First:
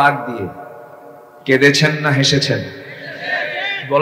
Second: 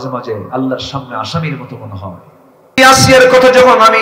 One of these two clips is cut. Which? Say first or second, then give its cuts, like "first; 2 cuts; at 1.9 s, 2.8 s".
second; 1 cut; at 2.8 s